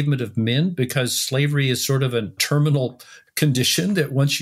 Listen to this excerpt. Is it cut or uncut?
uncut